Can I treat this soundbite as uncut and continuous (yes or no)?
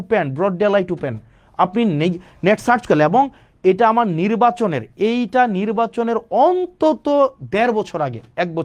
yes